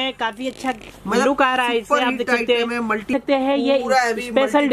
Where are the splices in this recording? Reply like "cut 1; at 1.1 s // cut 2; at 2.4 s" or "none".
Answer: cut 1; at 3.1 s